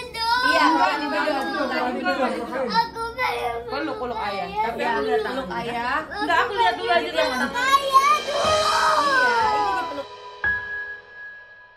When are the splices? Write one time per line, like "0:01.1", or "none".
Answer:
0:09.7